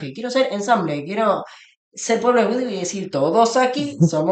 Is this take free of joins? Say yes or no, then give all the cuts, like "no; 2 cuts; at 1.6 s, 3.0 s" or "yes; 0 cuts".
yes; 0 cuts